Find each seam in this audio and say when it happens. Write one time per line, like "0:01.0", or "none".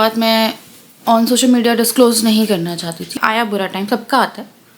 0:03.1